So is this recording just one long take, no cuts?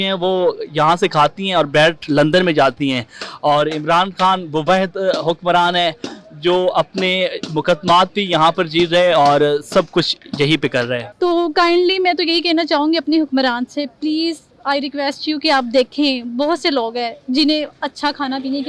no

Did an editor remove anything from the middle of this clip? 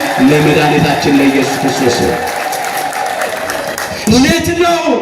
yes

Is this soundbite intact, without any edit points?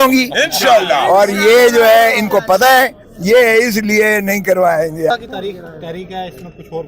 no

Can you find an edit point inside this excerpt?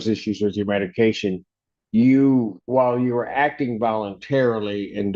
yes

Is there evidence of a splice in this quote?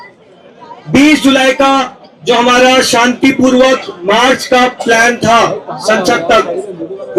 no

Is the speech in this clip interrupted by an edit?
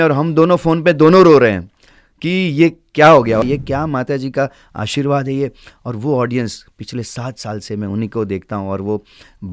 yes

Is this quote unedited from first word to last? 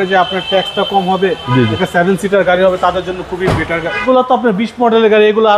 no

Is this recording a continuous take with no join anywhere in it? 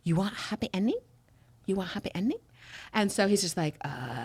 yes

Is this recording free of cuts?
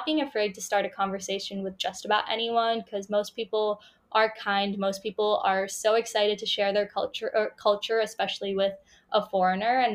yes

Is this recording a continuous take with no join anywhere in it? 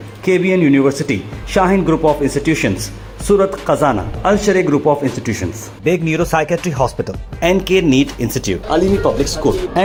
yes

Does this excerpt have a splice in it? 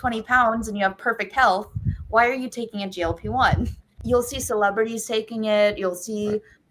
yes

